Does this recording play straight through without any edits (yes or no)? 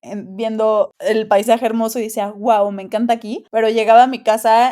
no